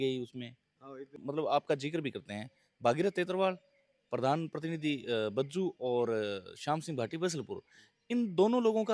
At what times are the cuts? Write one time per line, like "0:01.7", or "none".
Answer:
0:01.2